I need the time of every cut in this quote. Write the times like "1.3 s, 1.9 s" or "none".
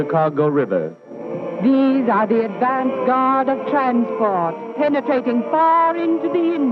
4.1 s